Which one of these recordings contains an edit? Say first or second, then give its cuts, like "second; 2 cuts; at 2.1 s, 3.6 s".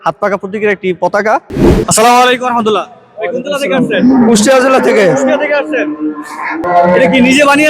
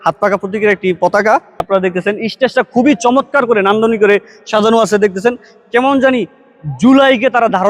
first; 1 cut; at 1.5 s